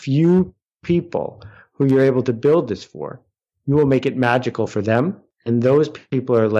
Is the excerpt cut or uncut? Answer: cut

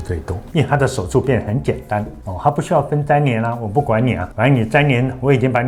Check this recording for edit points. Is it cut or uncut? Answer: uncut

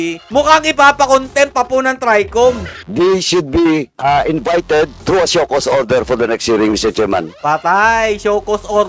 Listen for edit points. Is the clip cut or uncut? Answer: cut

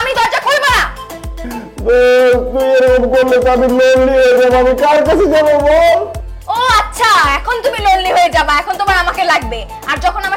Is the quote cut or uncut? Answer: uncut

